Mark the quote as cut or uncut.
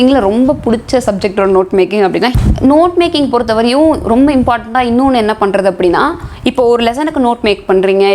cut